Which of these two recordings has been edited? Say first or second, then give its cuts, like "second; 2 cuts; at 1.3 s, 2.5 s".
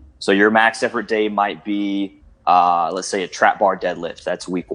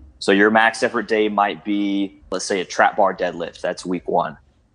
second; 1 cut; at 2.3 s